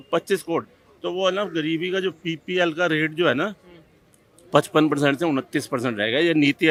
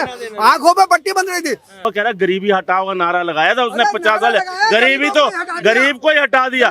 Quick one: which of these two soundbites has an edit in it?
second; 1 cut; at 1.9 s

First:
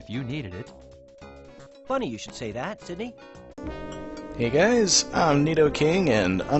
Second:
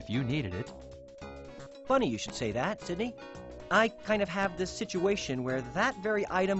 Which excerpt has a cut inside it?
second; 1 cut; at 3.6 s

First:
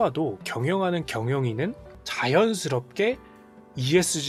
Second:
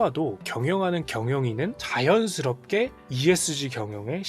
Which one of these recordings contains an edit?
second; 2 cuts; at 1.8 s, 3.0 s

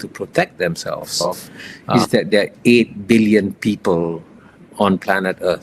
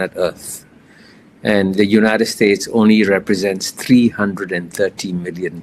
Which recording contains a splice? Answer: first; 2 cuts; at 1.2 s, 3.5 s

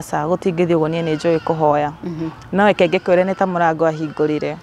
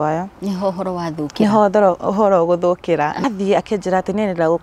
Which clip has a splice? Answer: second; 1 cut; at 3.2 s

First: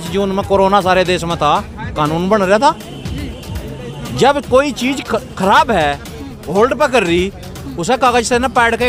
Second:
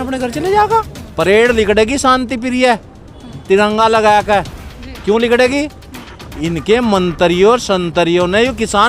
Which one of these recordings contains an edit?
second; 1 cut; at 1.0 s

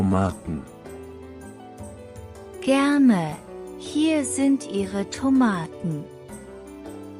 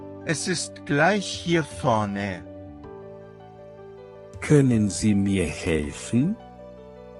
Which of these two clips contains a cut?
second; 3 cuts; at 2.4 s, 4.0 s, 6.4 s

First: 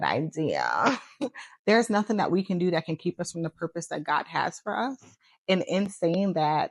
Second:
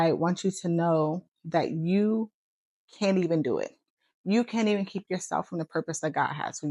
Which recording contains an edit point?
first; 1 cut; at 1.3 s

